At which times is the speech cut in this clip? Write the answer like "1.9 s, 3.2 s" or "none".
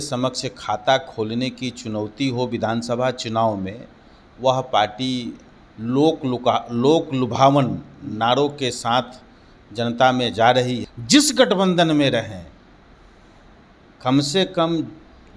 10.9 s